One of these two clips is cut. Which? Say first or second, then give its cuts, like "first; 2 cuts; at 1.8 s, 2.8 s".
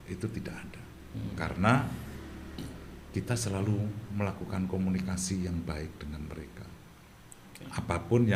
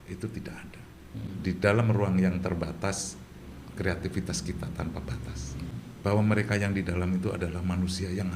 second; 2 cuts; at 1.3 s, 5.7 s